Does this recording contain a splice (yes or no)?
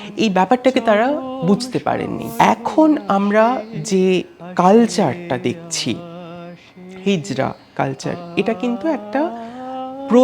yes